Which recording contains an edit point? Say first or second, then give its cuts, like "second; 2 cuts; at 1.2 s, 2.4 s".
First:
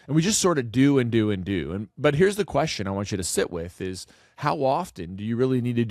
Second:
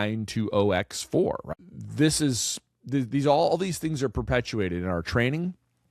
second; 1 cut; at 1.6 s